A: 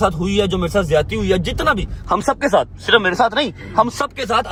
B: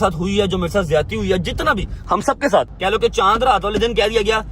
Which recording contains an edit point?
B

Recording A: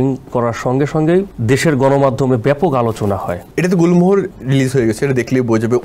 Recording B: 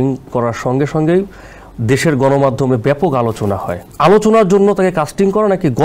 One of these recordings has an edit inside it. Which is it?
A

